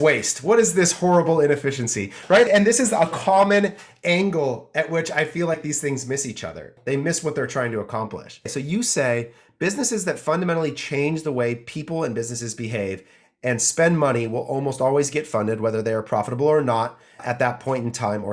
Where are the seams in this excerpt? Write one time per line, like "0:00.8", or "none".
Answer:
0:02.5
0:06.7
0:08.5
0:17.2